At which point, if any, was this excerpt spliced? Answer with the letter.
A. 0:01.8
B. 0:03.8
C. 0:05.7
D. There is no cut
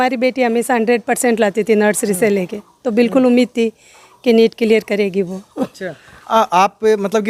D